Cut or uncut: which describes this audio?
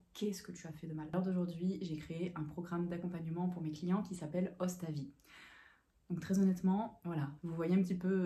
cut